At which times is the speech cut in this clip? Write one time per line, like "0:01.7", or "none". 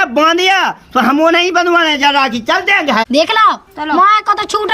0:03.0